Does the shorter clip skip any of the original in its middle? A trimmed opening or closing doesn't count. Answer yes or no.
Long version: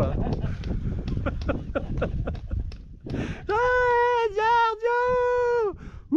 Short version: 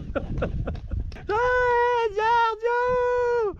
yes